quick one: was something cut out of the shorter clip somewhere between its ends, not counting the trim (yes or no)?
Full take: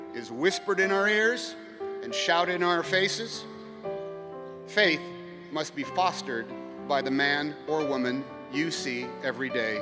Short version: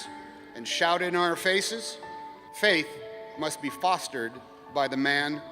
yes